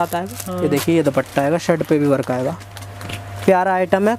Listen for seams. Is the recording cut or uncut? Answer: uncut